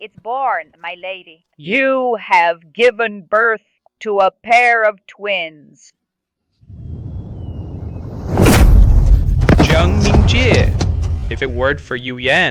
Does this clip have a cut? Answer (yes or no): no